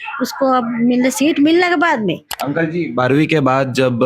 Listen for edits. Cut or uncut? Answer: cut